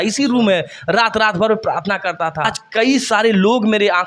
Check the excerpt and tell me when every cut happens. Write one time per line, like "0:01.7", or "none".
0:02.6

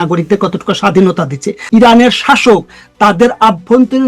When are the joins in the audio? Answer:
0:01.5

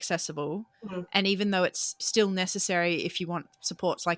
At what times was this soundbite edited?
0:02.0

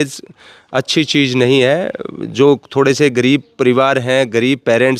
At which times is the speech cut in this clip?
none

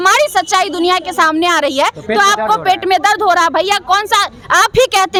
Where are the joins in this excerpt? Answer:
none

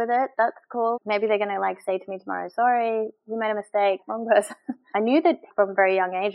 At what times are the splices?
0:04.7
0:05.5

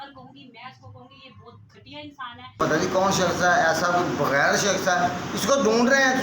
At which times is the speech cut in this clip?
0:02.6

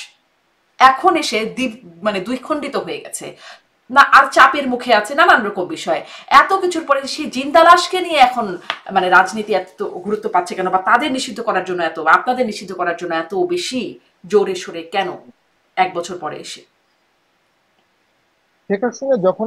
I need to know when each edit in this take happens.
none

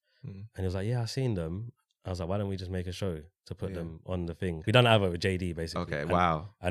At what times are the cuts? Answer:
0:04.6

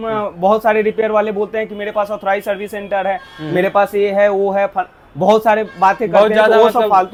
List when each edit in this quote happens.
none

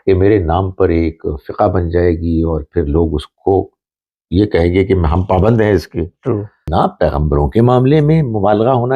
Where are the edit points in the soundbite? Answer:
0:06.6

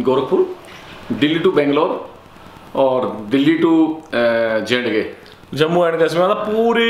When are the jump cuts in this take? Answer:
none

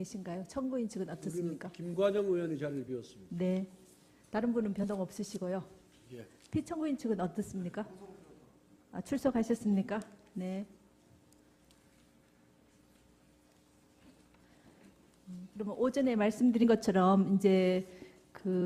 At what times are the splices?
none

